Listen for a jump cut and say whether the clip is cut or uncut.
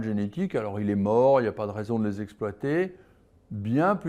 uncut